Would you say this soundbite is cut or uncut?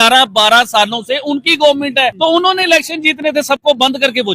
cut